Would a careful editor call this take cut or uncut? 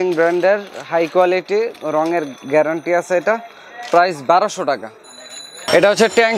uncut